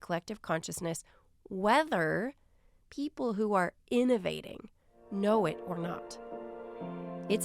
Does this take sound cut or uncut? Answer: uncut